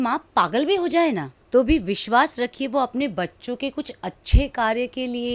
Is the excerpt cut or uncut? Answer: cut